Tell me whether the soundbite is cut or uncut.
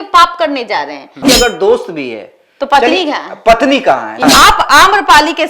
cut